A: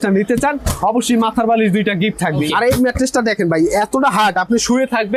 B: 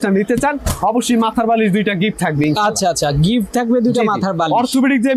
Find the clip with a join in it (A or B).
A